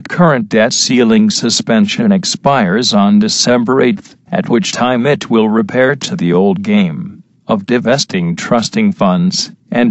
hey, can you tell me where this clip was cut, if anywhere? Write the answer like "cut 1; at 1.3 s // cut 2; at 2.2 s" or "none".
none